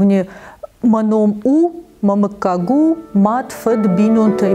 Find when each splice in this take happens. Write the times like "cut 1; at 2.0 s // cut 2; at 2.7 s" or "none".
none